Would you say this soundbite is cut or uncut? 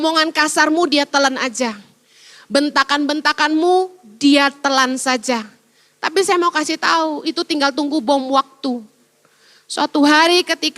uncut